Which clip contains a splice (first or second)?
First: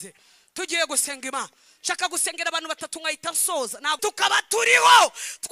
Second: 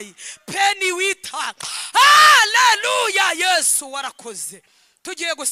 first